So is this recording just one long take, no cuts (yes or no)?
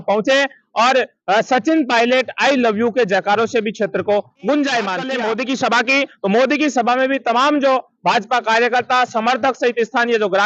no